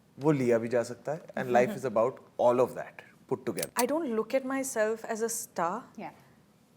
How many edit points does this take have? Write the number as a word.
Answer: one